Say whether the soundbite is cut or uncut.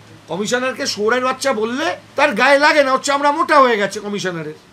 cut